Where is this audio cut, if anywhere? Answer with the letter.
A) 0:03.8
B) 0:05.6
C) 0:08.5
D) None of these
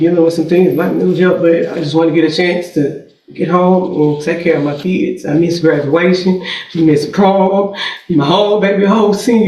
B